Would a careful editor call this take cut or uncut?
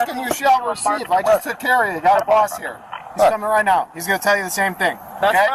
uncut